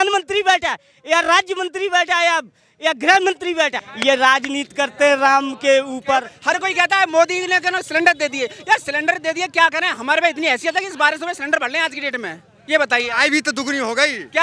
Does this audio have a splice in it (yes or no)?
yes